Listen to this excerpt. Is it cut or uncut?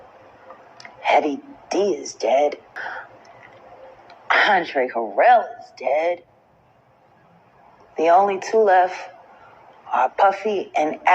cut